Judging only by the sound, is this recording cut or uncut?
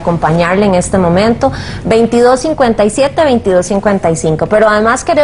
uncut